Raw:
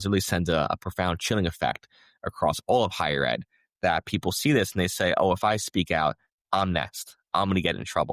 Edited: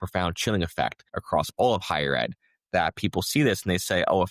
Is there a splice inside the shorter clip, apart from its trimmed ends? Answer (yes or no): yes